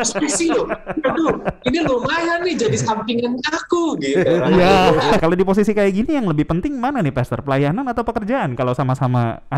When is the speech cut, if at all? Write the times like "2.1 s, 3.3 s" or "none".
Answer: 5.2 s